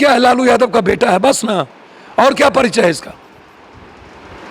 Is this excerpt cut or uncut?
uncut